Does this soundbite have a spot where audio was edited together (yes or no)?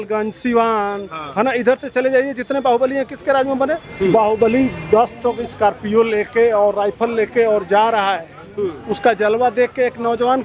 yes